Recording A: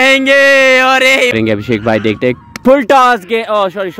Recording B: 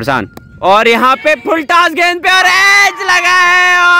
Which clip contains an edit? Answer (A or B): A